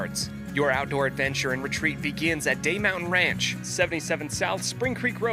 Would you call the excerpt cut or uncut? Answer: uncut